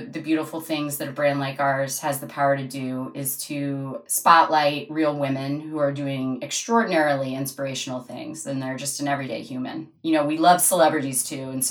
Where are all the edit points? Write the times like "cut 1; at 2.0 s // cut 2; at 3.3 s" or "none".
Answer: none